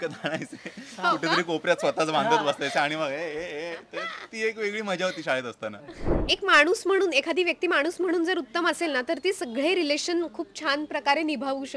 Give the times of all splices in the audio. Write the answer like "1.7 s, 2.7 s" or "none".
6.2 s